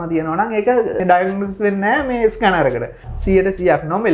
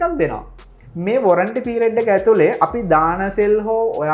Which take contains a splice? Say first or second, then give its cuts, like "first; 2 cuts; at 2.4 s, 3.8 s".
first; 2 cuts; at 1.0 s, 3.0 s